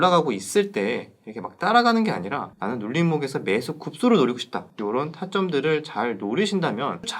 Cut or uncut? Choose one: cut